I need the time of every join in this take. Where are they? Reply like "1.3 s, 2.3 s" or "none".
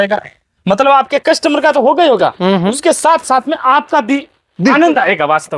none